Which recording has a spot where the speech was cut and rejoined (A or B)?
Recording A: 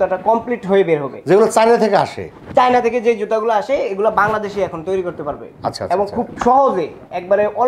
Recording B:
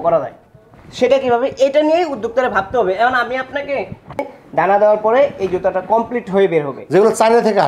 B